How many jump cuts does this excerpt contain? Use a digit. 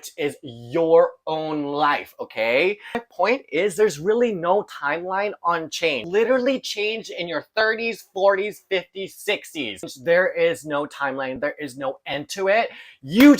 3